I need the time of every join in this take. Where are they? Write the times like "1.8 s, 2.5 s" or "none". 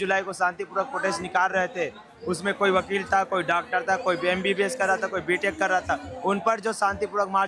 none